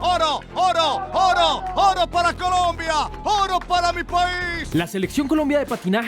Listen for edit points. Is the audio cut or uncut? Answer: cut